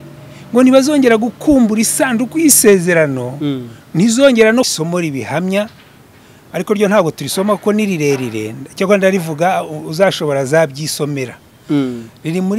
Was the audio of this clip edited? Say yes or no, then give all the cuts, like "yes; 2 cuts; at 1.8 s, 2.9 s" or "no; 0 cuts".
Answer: yes; 1 cut; at 4.7 s